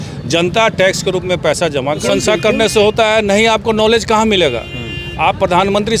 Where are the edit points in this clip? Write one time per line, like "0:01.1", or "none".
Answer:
0:02.0